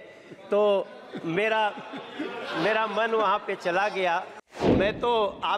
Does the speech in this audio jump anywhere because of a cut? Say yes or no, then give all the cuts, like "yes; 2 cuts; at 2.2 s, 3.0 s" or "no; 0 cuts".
yes; 1 cut; at 4.7 s